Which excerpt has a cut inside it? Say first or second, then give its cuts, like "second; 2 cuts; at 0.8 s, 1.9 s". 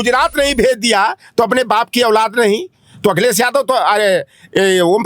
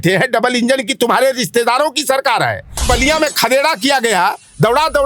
second; 1 cut; at 2.8 s